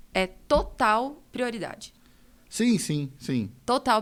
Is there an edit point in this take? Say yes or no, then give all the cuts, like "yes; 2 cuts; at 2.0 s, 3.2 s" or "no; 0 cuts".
no; 0 cuts